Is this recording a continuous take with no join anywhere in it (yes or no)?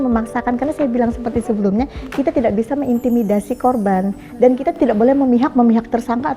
yes